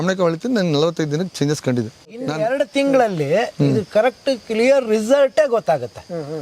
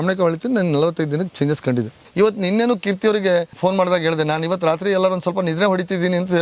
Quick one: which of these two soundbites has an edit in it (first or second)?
second